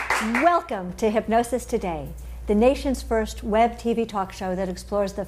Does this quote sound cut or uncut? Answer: cut